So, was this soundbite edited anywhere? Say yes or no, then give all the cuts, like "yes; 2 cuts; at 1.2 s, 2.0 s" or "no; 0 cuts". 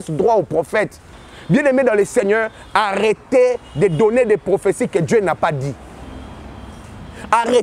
yes; 1 cut; at 1.1 s